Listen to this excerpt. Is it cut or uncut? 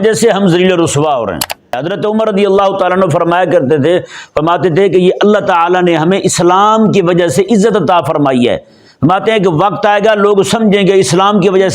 cut